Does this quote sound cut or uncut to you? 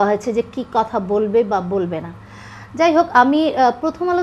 uncut